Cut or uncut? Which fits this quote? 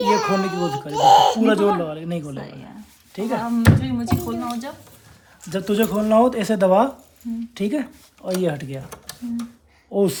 uncut